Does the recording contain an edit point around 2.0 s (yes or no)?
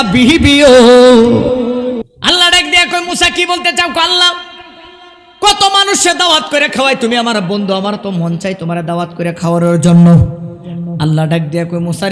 yes